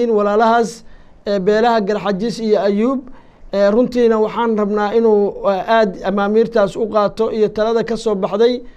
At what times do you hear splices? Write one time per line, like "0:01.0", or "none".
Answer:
none